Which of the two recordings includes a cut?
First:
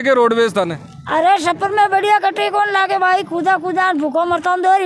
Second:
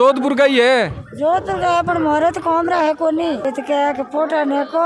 second; 1 cut; at 3.5 s

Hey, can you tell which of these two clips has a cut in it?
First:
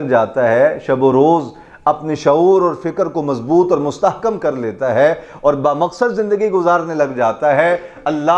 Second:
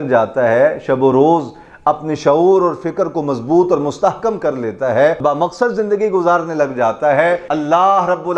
second; 2 cuts; at 5.2 s, 7.5 s

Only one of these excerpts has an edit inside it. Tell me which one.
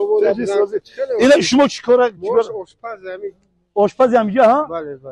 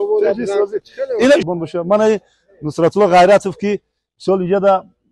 second; 1 cut; at 1.5 s

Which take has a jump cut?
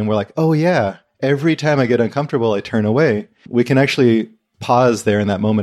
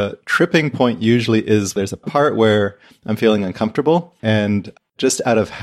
second; 2 cuts; at 1.8 s, 4.1 s

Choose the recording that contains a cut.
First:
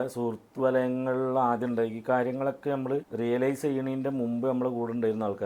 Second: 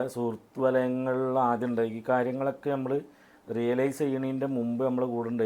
first; 1 cut; at 3.1 s

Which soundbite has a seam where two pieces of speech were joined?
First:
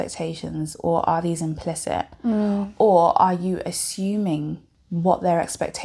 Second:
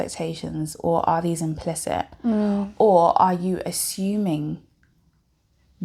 first; 1 cut; at 4.7 s

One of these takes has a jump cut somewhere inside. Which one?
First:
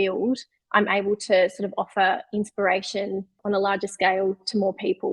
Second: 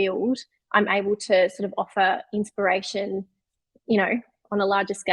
first; 1 cut; at 3.3 s

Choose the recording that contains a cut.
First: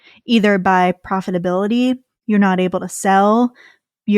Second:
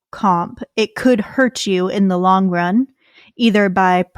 first; 1 cut; at 2.1 s

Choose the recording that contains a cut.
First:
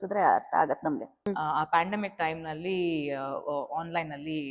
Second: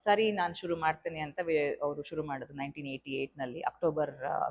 first; 1 cut; at 1.3 s

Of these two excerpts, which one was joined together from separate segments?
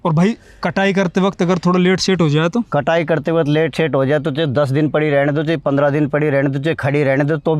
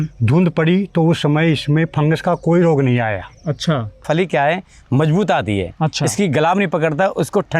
second; 1 cut; at 4.0 s

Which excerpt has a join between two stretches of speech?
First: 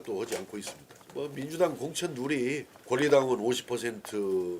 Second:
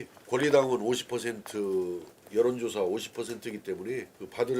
first; 1 cut; at 1.0 s

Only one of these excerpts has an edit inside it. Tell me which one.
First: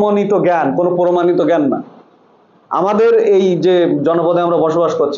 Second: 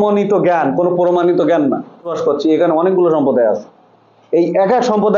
second; 1 cut; at 2.1 s

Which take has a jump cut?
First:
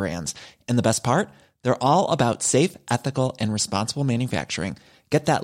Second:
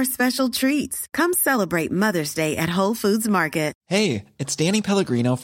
second; 1 cut; at 3.8 s

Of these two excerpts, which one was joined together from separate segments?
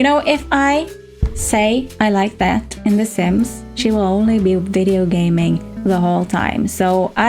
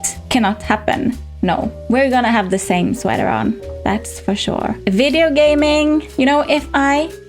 second; 2 cuts; at 1.2 s, 4.7 s

